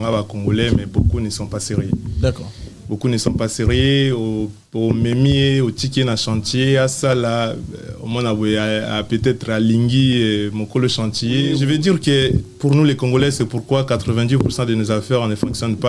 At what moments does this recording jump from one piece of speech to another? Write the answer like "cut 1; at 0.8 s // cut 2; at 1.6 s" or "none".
cut 1; at 11.5 s